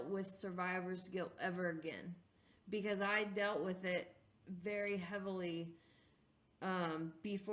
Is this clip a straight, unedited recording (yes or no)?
yes